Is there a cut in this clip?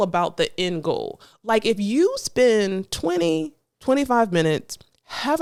no; 0 cuts

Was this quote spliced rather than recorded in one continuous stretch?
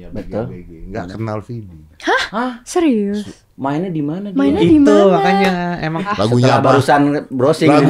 yes; 1 cut; at 6.1 s

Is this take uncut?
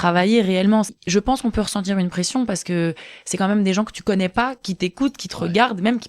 no; 1 cut; at 0.9 s

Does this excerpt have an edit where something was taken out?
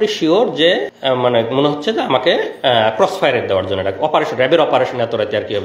yes; 1 cut; at 0.9 s

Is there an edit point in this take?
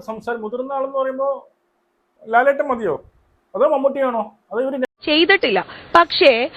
yes; 1 cut; at 5.0 s

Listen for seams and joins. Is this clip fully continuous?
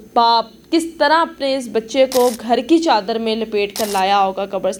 yes; 0 cuts

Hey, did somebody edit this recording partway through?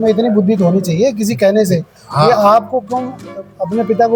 no; 0 cuts

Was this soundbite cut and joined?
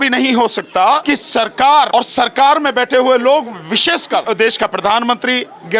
yes; 3 cuts; at 1.0 s, 1.9 s, 4.2 s

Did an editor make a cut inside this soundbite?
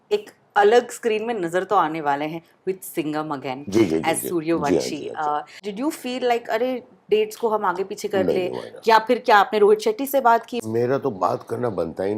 yes; 2 cuts; at 5.6 s, 10.6 s

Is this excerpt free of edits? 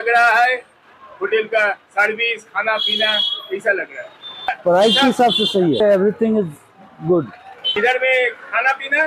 no; 2 cuts; at 4.6 s, 5.8 s

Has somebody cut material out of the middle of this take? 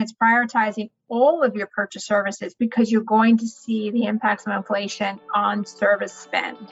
no; 0 cuts

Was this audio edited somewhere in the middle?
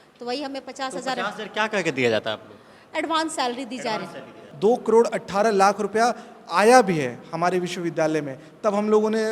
yes; 1 cut; at 4.4 s

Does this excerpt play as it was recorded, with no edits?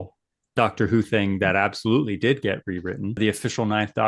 no; 1 cut; at 3.2 s

